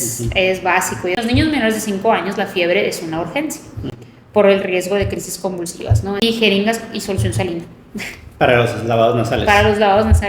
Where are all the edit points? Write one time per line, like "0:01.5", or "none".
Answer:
0:01.2
0:06.2